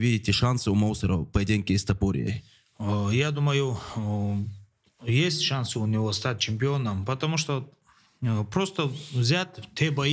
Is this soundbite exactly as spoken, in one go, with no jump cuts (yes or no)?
yes